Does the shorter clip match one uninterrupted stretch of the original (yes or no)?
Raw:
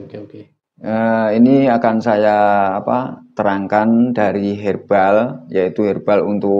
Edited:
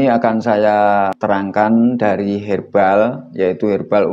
no